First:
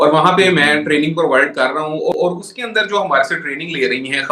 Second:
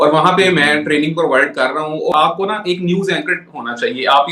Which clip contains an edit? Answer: second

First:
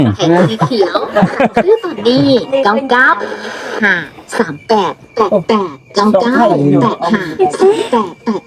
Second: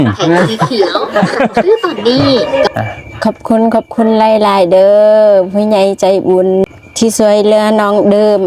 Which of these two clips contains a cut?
second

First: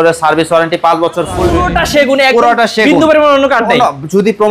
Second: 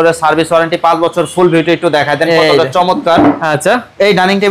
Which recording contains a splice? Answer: first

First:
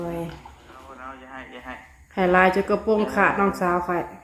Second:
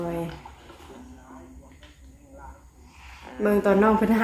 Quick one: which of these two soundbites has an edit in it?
first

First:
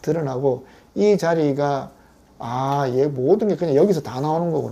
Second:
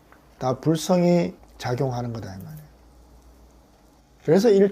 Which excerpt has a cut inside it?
second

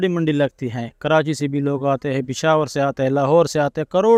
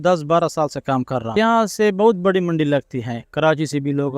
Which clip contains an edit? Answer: second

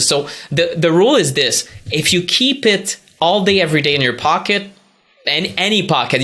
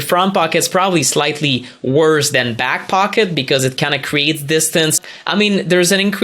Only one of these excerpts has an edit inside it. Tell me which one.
second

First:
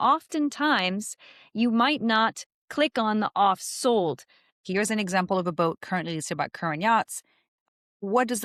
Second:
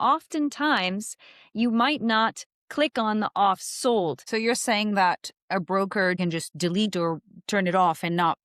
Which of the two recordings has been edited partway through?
second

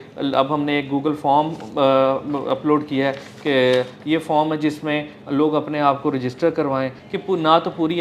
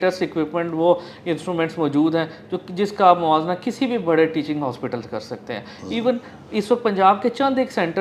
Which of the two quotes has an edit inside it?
first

